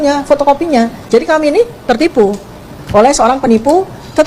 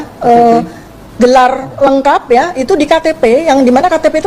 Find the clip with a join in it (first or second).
first